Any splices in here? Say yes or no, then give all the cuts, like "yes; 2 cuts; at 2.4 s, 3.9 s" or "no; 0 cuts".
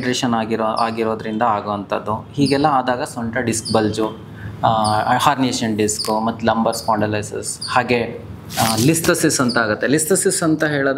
no; 0 cuts